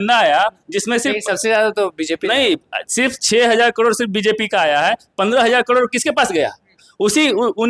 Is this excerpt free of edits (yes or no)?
yes